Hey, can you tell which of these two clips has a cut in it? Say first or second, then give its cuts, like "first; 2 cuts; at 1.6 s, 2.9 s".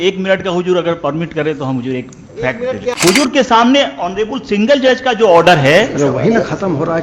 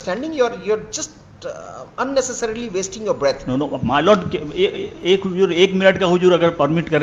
first; 1 cut; at 2.9 s